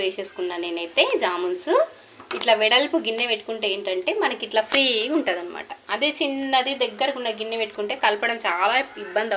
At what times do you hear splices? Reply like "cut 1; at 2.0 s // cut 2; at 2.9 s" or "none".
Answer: none